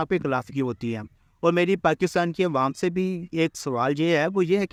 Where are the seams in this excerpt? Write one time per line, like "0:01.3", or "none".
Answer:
none